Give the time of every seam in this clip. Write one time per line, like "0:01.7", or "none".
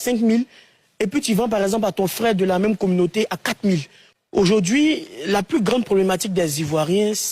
0:04.0